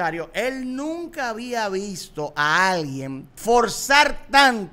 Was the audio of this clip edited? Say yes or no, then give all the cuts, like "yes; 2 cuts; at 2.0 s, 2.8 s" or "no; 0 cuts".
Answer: yes; 1 cut; at 3.3 s